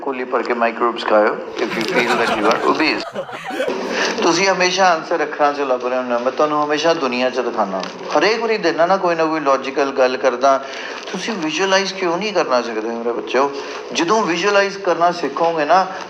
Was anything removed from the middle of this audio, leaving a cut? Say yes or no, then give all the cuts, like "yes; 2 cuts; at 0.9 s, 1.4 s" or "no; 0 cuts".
yes; 1 cut; at 3.4 s